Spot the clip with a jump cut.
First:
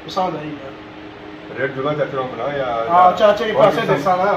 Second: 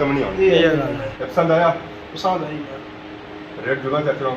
second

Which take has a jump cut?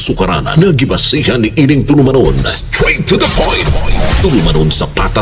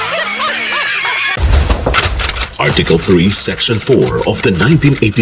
second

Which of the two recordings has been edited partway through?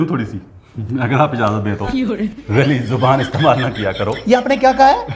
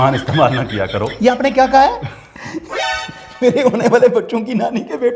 first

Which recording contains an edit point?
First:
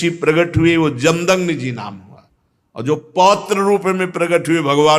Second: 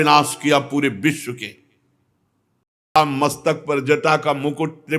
second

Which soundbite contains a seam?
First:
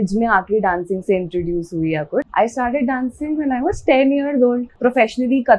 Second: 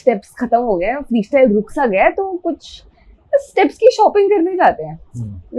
first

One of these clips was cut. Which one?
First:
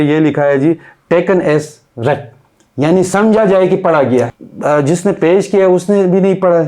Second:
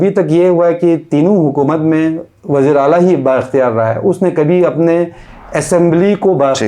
first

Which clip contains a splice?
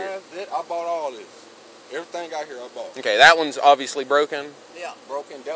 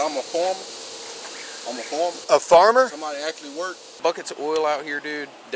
second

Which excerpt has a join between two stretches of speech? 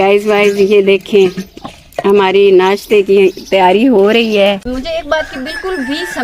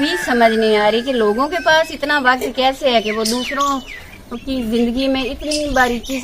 first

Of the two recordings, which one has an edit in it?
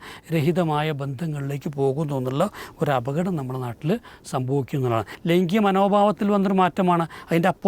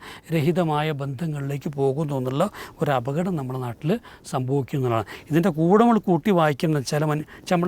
first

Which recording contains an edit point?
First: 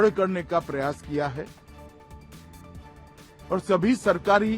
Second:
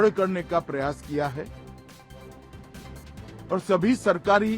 first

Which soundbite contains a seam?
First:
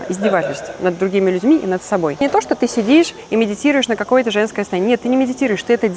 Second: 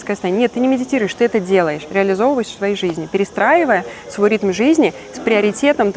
first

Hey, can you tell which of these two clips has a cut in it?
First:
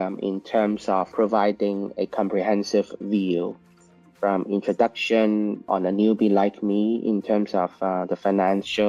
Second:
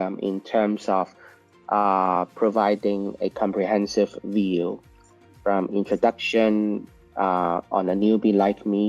first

